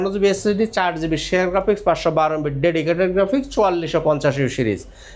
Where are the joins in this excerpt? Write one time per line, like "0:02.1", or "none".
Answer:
none